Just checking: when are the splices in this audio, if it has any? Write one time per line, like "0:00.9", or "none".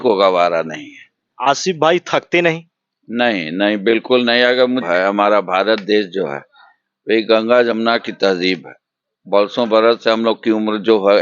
0:01.2
0:04.9

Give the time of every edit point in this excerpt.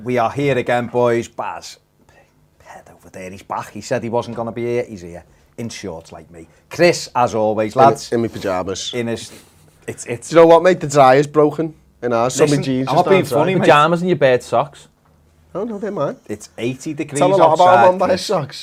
none

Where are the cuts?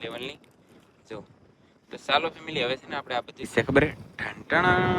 0:03.5

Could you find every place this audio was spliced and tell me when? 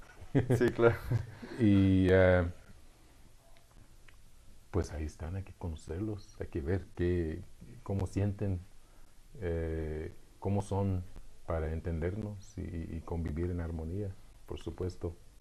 0:06.5

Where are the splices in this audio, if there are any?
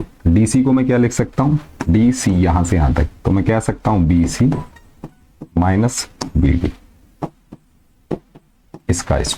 none

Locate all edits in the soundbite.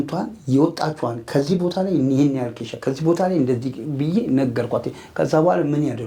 none

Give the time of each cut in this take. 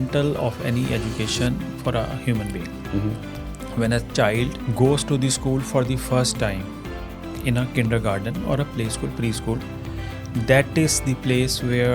0:04.6

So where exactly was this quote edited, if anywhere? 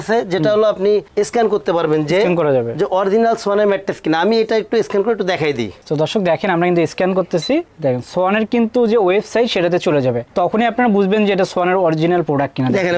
none

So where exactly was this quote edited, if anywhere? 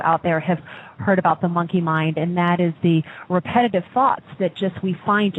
0:01.7

